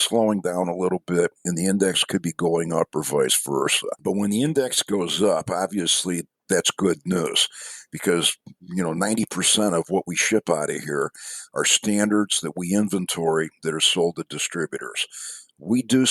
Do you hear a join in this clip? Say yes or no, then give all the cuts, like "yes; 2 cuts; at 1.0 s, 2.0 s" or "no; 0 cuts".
yes; 1 cut; at 1.4 s